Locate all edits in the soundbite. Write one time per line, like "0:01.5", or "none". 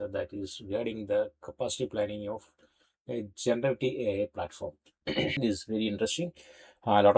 0:05.4

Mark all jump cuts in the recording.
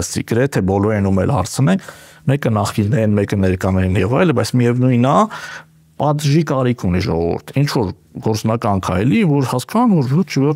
none

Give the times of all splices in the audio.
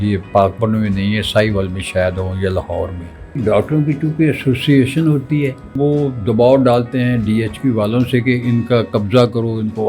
0:03.4
0:05.8

